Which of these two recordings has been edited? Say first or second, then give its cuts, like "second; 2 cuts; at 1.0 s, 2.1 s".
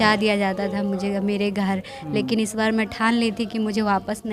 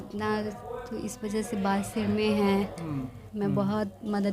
second; 1 cut; at 3.2 s